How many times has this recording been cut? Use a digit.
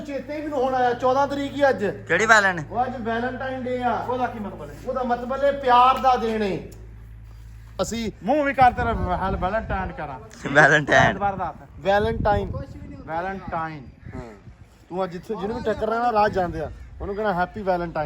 1